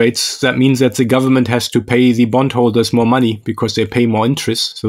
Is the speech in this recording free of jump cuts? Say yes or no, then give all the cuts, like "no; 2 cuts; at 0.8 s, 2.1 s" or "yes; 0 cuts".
yes; 0 cuts